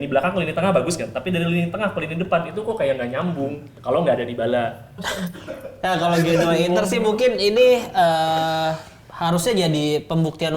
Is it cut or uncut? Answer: cut